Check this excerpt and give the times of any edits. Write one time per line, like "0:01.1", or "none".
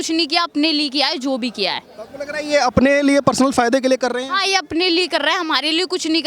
none